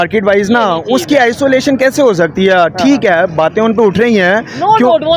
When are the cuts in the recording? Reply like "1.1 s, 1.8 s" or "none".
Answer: none